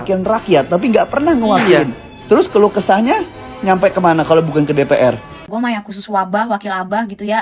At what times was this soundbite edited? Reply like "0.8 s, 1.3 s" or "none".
5.3 s